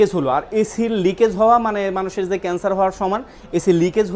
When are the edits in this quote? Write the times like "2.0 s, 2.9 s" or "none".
none

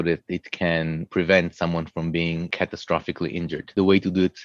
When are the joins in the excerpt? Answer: 1.1 s, 2.5 s, 3.7 s

